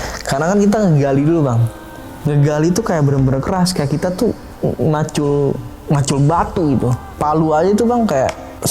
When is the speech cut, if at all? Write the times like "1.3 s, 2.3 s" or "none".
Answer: 7.1 s